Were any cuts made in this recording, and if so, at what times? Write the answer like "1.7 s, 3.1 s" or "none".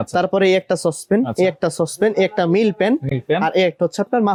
none